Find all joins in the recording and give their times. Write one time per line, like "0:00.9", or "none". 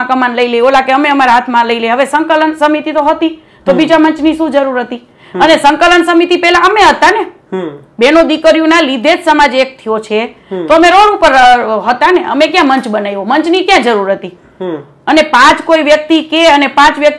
none